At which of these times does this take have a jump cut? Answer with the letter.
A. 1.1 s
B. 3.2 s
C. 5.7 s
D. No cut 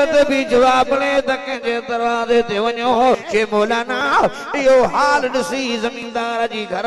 B